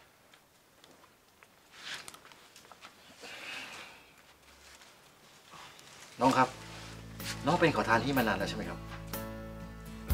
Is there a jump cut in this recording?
yes; 1 cut; at 1.0 s

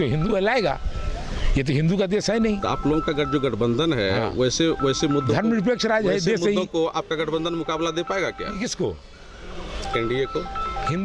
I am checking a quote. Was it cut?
no; 0 cuts

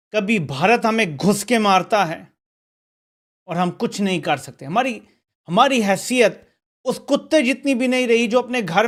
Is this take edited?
no; 0 cuts

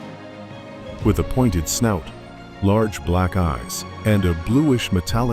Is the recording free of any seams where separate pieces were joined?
no; 1 cut; at 1.0 s

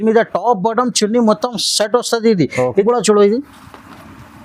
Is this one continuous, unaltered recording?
no; 1 cut; at 2.8 s

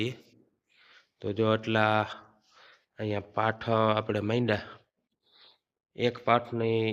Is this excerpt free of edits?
yes; 0 cuts

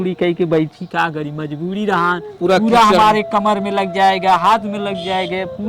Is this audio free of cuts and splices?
no; 1 cut; at 2.3 s

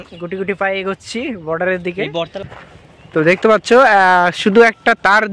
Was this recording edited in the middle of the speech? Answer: yes; 1 cut; at 2.3 s

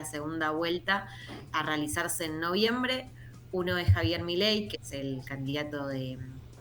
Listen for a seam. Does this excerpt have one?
no; 0 cuts

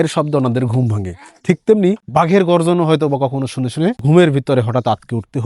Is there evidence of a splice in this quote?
yes; 2 cuts; at 2.0 s, 4.0 s

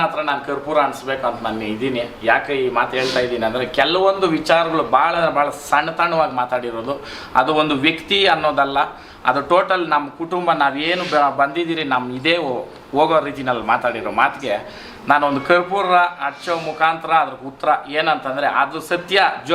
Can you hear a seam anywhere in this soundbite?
no; 0 cuts

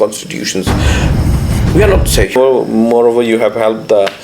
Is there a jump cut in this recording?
yes; 1 cut; at 2.3 s

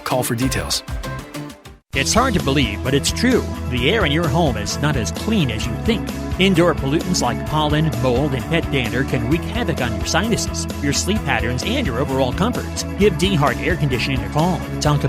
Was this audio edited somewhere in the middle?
no; 0 cuts

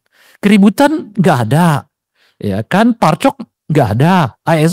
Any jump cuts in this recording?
no; 0 cuts

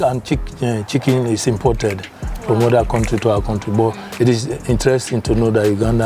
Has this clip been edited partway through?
no; 0 cuts

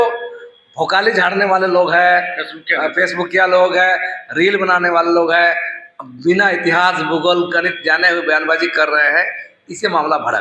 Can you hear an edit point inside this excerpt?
no; 0 cuts

